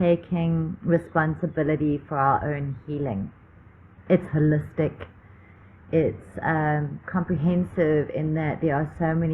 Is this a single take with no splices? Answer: yes; 0 cuts

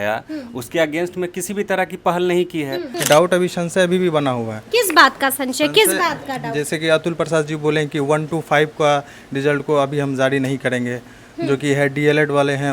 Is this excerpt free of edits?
no; 1 cut; at 2.9 s

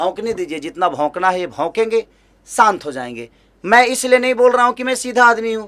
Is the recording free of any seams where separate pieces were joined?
yes; 0 cuts

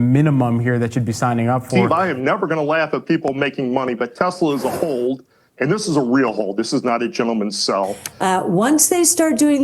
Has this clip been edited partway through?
yes; 2 cuts; at 1.7 s, 8.0 s

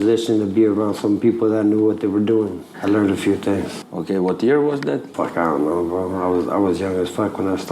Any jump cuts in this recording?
no; 0 cuts

